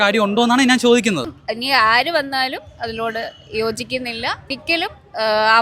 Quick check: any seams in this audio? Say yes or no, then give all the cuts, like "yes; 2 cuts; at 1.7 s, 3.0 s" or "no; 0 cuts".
yes; 2 cuts; at 1.5 s, 4.6 s